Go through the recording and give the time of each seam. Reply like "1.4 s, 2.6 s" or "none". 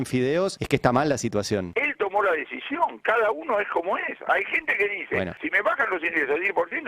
1.7 s, 5.4 s